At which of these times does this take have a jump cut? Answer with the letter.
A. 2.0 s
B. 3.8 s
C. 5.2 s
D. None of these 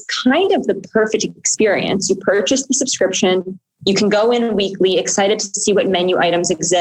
D